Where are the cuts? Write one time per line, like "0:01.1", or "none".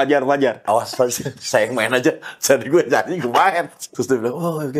0:03.9